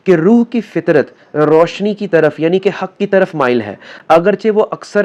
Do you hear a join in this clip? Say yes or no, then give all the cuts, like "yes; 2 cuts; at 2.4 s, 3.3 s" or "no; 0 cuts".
no; 0 cuts